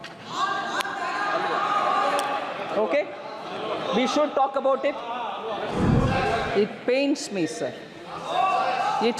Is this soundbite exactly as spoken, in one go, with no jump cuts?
no; 1 cut; at 5.7 s

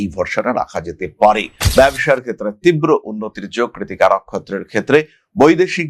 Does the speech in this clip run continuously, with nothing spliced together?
no; 1 cut; at 1.6 s

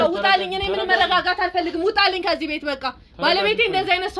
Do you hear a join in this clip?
no; 0 cuts

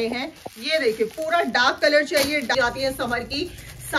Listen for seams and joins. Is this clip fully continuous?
no; 1 cut; at 2.5 s

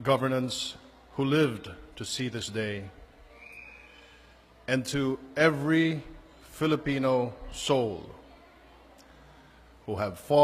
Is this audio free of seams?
no; 1 cut; at 4.8 s

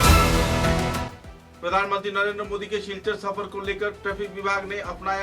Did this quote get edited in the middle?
yes; 1 cut; at 1.0 s

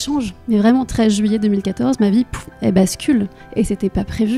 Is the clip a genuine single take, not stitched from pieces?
yes; 0 cuts

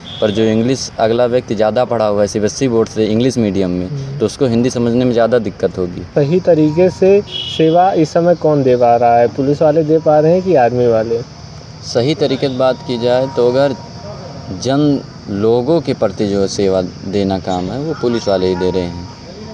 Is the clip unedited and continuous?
no; 1 cut; at 6.1 s

